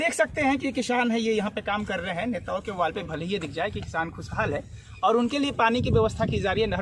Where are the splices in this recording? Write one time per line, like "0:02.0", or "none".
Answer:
none